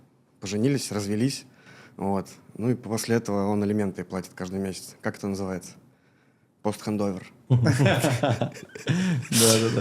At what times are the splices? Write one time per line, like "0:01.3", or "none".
none